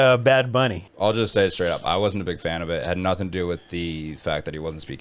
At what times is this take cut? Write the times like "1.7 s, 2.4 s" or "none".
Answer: none

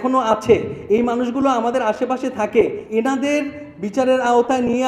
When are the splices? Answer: 2.8 s

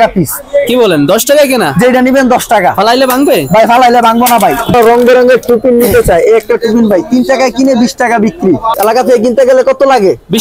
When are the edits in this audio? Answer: 4.7 s, 8.7 s

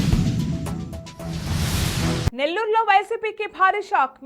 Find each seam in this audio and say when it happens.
2.3 s

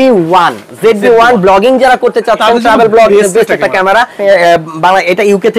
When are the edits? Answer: 4.2 s

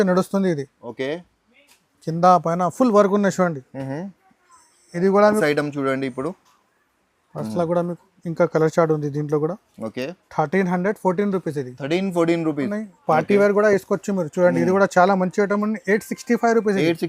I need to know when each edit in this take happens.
5.4 s, 12.7 s

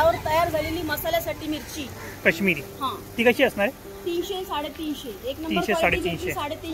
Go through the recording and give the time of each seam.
2.0 s

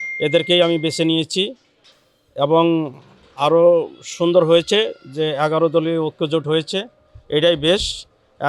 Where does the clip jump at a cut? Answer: none

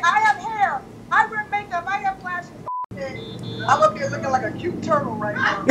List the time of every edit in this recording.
2.7 s

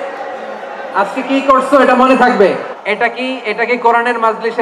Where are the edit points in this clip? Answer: 2.7 s

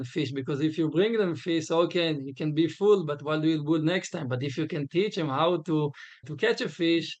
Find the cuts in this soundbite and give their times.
6.3 s

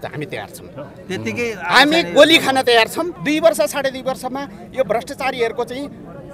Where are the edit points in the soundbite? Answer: 3.1 s

